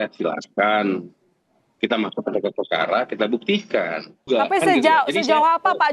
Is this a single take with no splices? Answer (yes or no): no